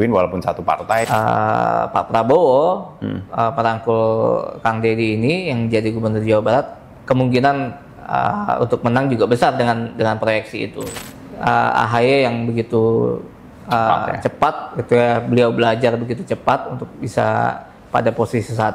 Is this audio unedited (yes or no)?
no